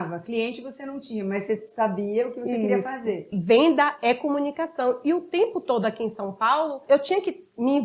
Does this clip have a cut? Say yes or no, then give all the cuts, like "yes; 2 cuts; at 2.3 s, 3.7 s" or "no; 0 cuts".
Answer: yes; 2 cuts; at 3.3 s, 6.8 s